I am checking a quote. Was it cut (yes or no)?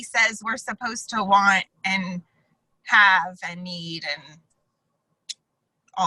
no